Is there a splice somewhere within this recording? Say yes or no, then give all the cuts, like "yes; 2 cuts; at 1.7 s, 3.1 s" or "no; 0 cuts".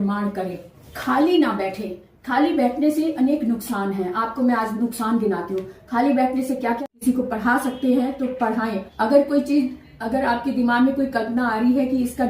yes; 1 cut; at 6.8 s